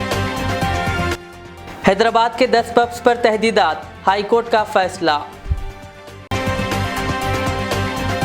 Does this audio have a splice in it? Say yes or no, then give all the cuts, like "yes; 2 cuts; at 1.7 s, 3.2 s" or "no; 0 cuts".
no; 0 cuts